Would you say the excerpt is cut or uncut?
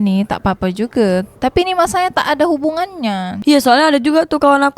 cut